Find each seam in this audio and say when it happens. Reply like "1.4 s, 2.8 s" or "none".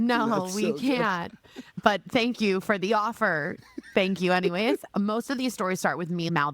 4.9 s